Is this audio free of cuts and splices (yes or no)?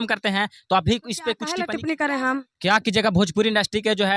no